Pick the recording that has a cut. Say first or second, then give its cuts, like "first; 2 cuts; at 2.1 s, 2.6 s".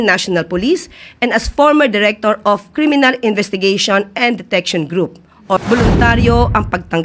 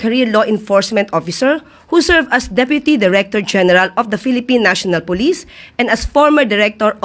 first; 1 cut; at 5.6 s